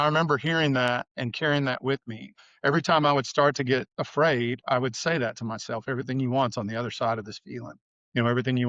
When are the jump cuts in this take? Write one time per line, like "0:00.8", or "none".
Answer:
0:01.1
0:02.4
0:04.0